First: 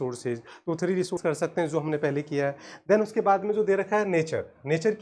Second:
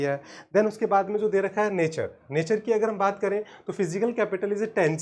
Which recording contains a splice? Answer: first; 1 cut; at 1.2 s

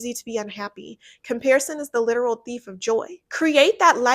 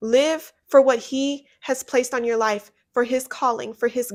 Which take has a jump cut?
first; 1 cut; at 3.2 s

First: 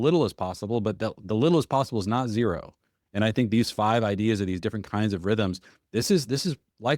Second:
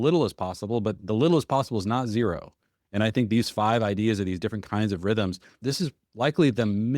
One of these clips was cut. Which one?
second; 2 cuts; at 1.0 s, 5.6 s

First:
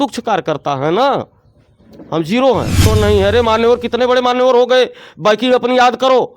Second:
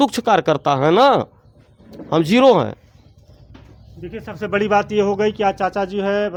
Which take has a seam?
first; 1 cut; at 2.9 s

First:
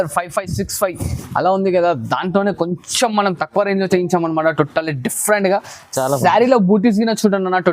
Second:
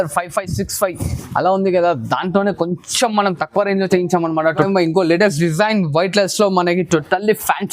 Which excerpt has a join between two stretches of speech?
second; 1 cut; at 4.7 s

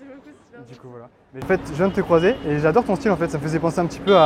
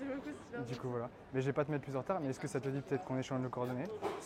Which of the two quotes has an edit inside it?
first; 1 cut; at 1.5 s

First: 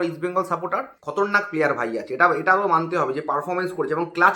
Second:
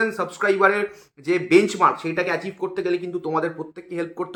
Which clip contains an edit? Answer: first; 1 cut; at 1.0 s

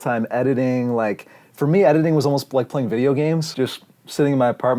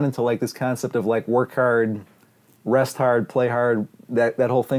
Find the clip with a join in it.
first; 1 cut; at 3.5 s

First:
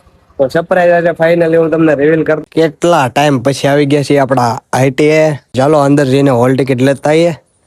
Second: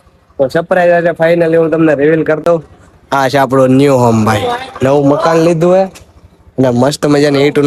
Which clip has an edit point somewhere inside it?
first; 2 cuts; at 2.4 s, 5.4 s

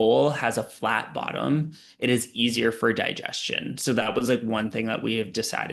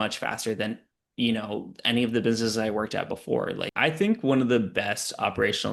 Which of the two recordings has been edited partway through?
second; 1 cut; at 3.7 s

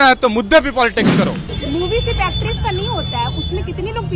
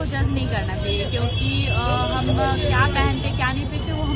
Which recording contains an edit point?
first; 1 cut; at 1.5 s

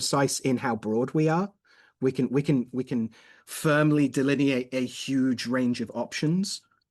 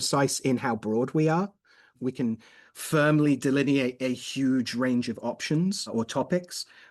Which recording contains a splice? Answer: second; 2 cuts; at 2.0 s, 5.9 s

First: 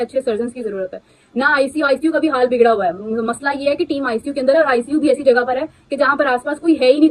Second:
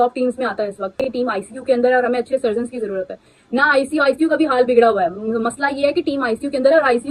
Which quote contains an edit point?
second; 1 cut; at 1.0 s

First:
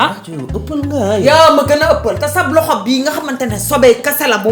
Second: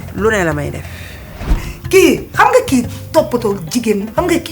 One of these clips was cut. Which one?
second; 1 cut; at 1.7 s

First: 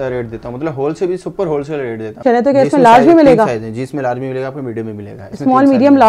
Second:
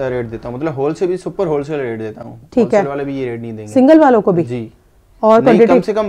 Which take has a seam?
first; 1 cut; at 2.2 s

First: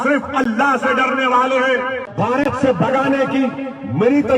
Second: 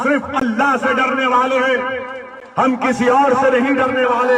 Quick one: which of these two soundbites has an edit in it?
first; 1 cut; at 2.0 s

